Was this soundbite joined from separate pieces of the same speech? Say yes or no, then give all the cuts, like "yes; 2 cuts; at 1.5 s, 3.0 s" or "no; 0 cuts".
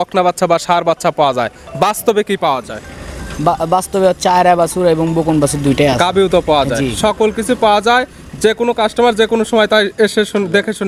no; 0 cuts